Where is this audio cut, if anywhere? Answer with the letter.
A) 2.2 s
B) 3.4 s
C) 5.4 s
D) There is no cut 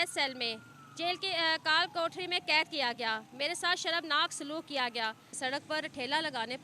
C